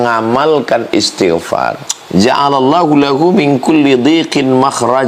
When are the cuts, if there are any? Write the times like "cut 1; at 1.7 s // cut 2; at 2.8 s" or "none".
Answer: cut 1; at 1.9 s